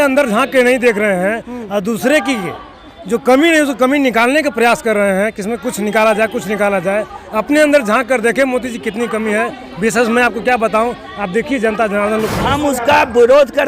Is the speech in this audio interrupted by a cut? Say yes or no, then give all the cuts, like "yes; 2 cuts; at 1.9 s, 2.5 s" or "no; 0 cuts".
yes; 1 cut; at 12.4 s